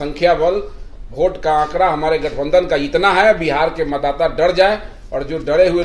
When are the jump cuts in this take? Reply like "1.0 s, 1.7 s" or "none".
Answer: none